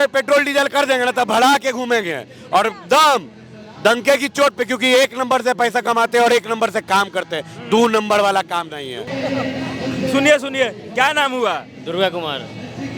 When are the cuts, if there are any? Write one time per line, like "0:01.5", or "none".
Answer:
none